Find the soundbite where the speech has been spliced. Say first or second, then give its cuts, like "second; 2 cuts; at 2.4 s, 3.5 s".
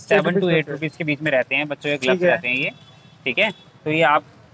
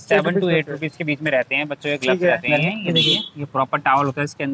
second; 1 cut; at 2.5 s